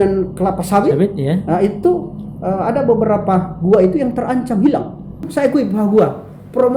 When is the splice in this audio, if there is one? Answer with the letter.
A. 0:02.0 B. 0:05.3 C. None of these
B